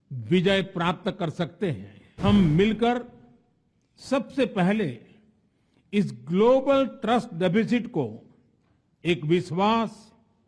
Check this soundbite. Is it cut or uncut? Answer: cut